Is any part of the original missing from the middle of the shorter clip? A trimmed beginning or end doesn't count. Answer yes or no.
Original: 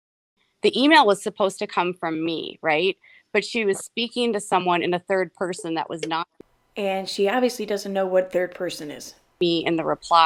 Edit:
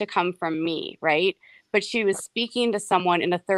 no